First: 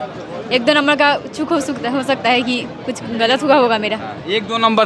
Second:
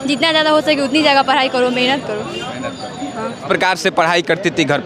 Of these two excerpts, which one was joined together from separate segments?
second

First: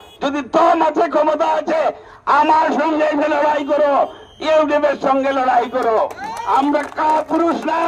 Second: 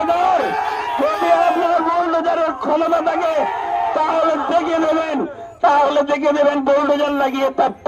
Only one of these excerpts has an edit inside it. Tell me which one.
first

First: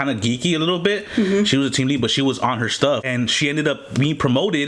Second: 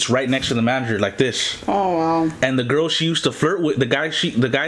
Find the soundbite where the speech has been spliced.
first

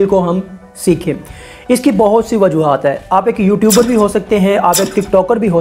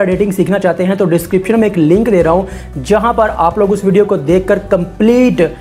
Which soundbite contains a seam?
second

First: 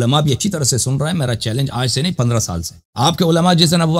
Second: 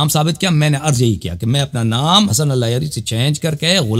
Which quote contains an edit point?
second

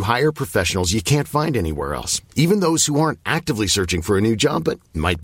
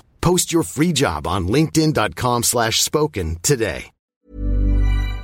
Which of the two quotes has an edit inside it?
second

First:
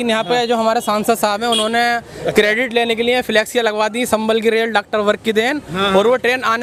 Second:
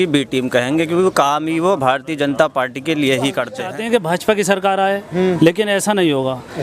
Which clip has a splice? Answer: second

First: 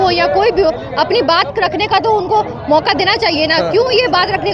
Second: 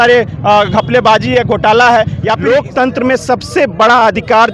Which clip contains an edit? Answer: second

